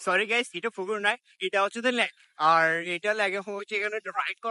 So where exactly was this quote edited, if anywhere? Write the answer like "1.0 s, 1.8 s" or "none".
none